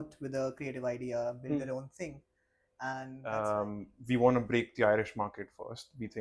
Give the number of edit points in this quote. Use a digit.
1